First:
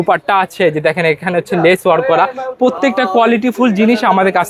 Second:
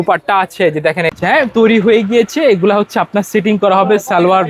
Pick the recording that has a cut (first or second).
second